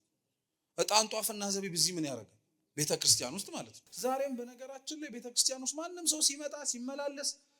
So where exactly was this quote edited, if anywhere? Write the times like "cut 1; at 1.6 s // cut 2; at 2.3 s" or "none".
cut 1; at 3.8 s